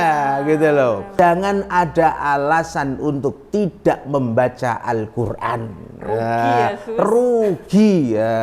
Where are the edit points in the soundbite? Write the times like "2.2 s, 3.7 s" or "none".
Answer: 1.1 s